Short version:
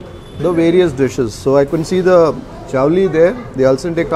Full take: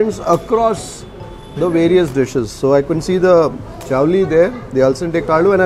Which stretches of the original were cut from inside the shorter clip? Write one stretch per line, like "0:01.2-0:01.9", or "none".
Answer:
none